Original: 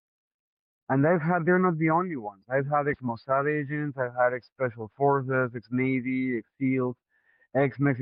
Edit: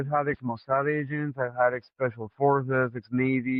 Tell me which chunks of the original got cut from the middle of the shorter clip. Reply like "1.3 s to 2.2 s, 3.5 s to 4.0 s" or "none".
none